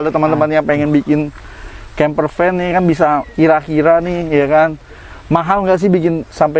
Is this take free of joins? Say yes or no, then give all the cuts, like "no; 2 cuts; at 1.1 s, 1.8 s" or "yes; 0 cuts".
yes; 0 cuts